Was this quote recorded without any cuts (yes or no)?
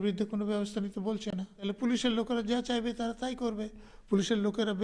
no